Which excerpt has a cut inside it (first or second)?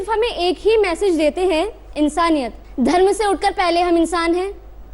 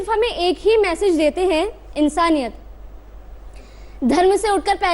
first